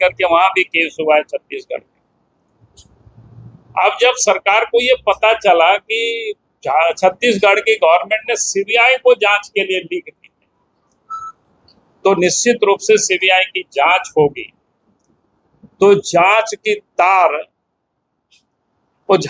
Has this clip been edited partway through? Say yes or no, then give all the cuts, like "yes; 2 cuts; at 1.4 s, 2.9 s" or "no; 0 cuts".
no; 0 cuts